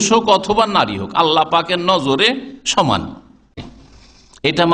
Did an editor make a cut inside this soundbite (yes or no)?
yes